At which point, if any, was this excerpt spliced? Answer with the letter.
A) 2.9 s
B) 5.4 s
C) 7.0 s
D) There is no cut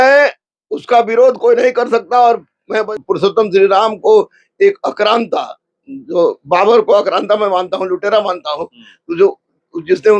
A